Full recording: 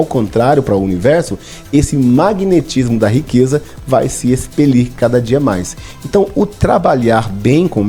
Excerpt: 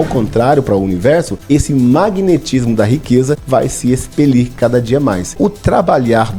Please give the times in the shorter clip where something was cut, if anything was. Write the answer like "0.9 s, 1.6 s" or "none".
1.3 s, 3.4 s, 5.3 s